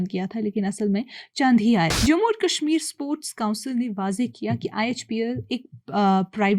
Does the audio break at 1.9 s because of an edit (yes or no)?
yes